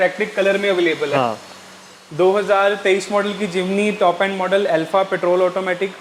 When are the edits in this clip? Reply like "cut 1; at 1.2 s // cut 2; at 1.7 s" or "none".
none